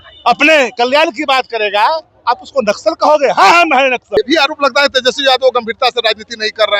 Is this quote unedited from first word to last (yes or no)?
no